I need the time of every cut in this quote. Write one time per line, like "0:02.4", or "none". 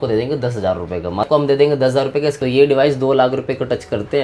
0:01.3
0:02.4